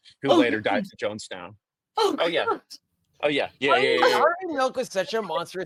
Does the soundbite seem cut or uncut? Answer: uncut